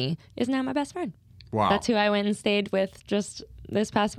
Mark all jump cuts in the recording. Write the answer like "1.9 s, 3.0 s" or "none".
none